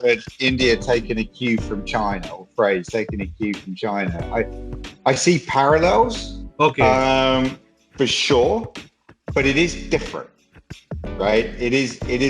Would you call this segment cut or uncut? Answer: uncut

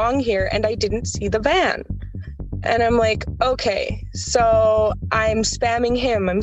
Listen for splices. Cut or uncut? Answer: uncut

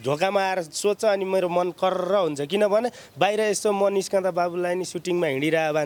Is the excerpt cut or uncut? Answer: uncut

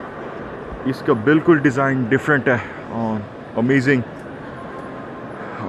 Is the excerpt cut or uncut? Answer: uncut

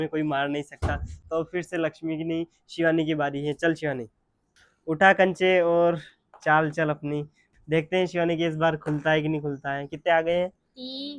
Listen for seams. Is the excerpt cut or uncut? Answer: uncut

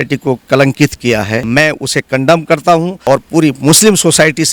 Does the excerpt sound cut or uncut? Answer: cut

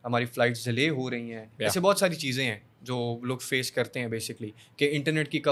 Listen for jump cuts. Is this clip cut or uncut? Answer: uncut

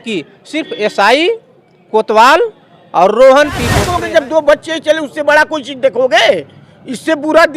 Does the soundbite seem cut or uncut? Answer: cut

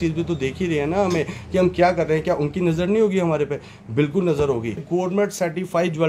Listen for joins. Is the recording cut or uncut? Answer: cut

